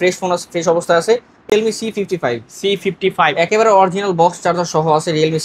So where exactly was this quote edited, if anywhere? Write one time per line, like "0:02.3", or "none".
0:01.5